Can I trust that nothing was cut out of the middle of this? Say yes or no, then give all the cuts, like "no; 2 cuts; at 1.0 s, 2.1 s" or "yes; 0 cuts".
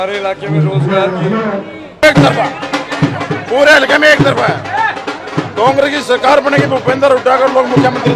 no; 1 cut; at 2.0 s